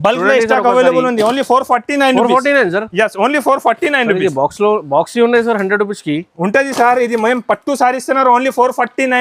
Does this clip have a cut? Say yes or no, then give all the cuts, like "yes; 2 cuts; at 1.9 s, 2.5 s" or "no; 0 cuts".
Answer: no; 0 cuts